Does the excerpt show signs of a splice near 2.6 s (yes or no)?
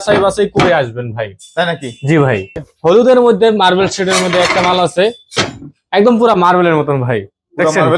yes